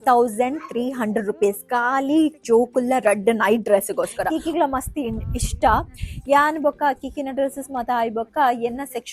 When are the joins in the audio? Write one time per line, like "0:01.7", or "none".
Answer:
0:04.3